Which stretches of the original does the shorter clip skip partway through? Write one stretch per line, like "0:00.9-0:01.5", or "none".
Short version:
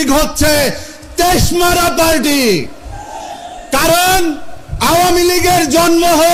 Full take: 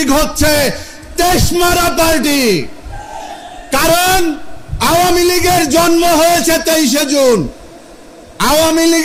none